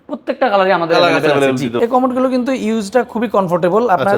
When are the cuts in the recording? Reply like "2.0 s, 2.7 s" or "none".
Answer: 1.7 s